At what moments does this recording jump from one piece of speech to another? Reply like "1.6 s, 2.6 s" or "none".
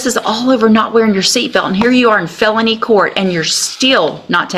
none